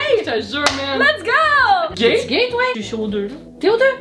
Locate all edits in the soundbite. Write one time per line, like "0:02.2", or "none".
0:01.9
0:02.9